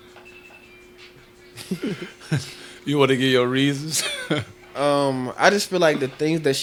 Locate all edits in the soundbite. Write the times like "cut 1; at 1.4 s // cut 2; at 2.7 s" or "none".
none

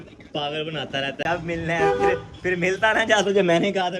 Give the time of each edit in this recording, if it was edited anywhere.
cut 1; at 1.2 s

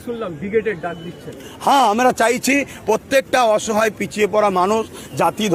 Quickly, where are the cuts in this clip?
none

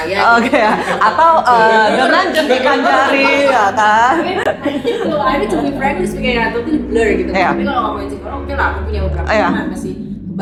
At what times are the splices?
none

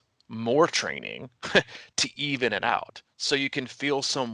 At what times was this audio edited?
none

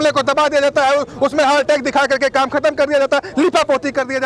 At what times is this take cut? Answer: none

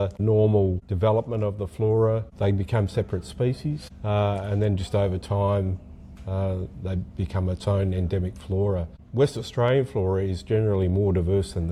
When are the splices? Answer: none

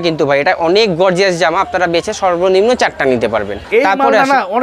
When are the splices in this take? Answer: cut 1; at 3.6 s

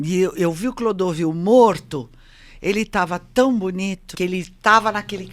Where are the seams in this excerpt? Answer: cut 1; at 4.1 s

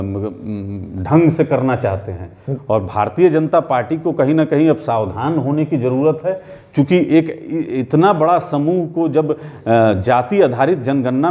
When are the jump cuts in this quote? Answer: none

